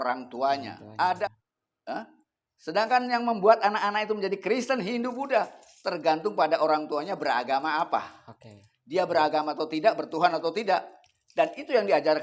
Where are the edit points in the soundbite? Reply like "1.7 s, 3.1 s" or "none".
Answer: 1.3 s